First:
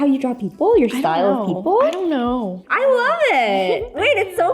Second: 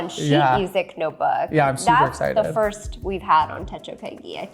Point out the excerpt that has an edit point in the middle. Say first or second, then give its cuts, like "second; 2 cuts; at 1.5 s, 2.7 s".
first; 1 cut; at 2.6 s